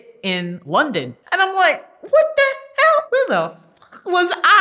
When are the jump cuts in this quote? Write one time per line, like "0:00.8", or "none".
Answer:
0:01.2
0:03.1